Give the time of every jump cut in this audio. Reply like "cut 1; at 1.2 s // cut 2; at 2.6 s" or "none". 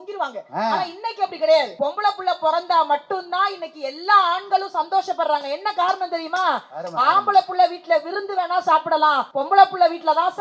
cut 1; at 1.7 s // cut 2; at 9.3 s